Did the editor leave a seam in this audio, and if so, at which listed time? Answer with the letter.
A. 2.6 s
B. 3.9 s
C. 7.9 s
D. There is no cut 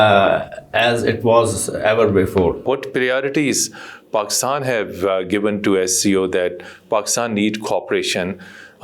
A